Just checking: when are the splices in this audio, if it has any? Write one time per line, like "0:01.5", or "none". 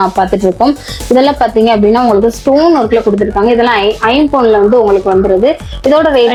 none